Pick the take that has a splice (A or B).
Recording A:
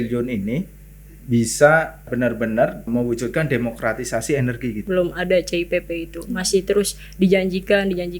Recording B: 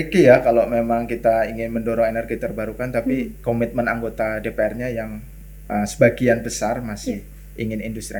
A